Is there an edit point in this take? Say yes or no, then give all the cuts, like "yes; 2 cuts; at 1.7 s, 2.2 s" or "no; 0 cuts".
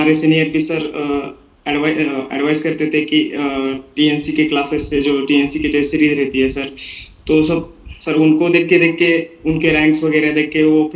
no; 0 cuts